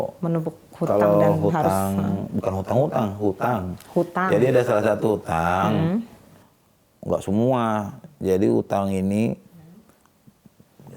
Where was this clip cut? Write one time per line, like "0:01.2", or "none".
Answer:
none